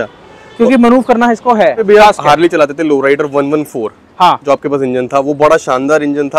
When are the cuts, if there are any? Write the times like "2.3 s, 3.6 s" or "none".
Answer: 1.8 s